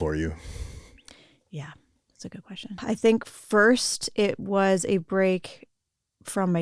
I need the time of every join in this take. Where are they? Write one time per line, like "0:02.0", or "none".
0:02.8